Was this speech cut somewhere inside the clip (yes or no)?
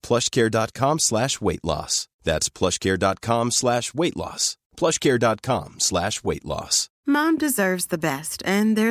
yes